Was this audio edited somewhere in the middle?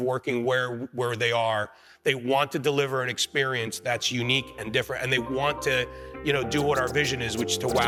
no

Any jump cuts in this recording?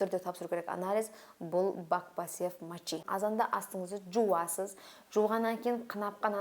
yes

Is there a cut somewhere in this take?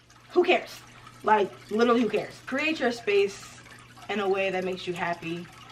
yes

